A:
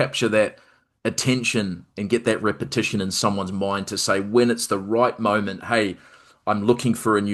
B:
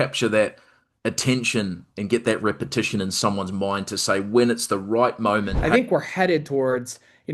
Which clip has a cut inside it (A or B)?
B